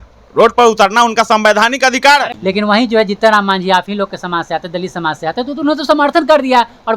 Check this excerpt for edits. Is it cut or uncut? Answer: cut